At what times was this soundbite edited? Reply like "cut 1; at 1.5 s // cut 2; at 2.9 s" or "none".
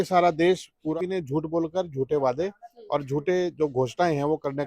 cut 1; at 0.9 s